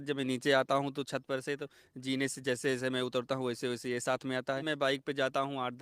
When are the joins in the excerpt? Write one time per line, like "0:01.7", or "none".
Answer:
0:04.6